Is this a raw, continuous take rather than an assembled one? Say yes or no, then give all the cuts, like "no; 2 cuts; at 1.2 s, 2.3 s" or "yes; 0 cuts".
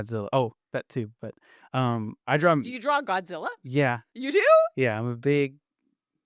yes; 0 cuts